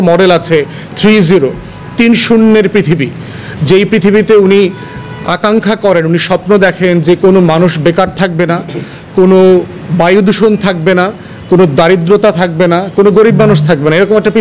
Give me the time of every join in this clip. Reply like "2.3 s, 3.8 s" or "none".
none